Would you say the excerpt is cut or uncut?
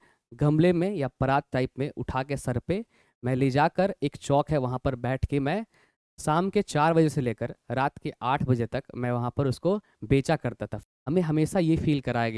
cut